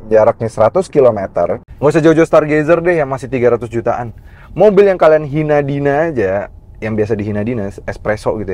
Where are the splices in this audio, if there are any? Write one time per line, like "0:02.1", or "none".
0:01.7